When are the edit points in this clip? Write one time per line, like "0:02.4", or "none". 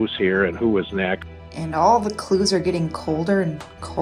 0:01.3

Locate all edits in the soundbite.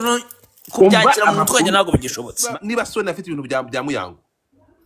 0:02.4

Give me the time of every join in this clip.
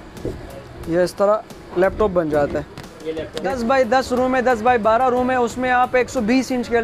0:03.5

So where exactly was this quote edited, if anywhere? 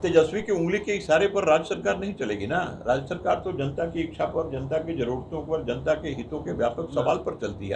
none

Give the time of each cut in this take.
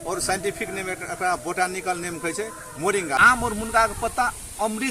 0:03.2

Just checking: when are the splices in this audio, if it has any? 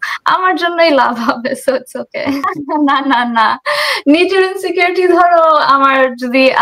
0:02.5

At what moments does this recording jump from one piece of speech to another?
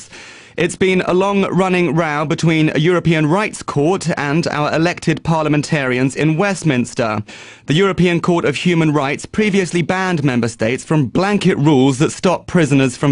none

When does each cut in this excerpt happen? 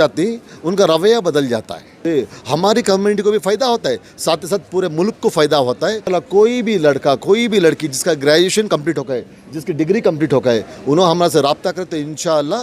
0:02.0
0:06.1

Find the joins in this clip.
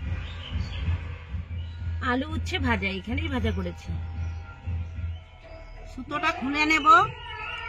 0:01.4
0:05.2

